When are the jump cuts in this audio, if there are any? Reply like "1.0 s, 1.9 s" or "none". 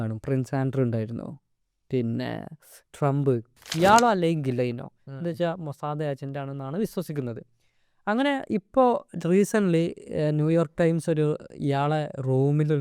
3.6 s

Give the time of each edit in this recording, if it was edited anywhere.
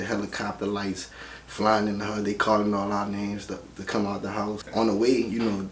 4.6 s

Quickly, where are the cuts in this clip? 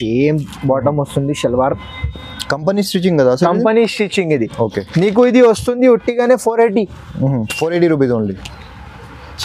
none

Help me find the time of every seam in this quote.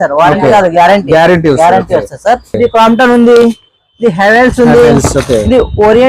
2.6 s

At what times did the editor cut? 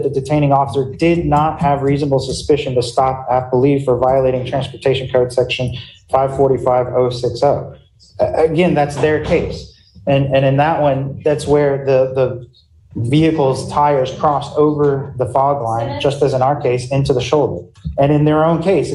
none

